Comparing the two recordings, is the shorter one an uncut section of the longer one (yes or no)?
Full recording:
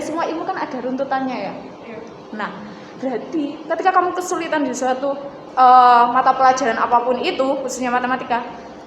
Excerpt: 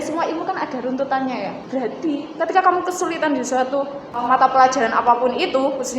no